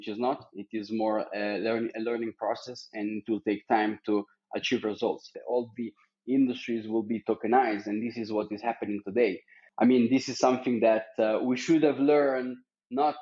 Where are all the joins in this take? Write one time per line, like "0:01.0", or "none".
0:05.3
0:09.6